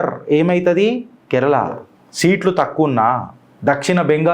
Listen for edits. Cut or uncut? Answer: uncut